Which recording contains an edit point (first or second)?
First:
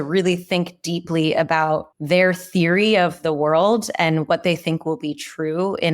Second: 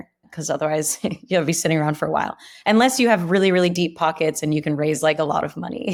first